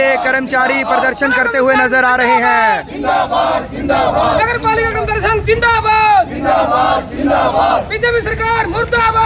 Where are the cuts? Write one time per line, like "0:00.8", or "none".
none